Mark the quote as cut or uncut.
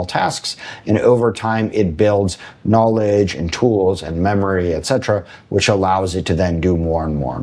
uncut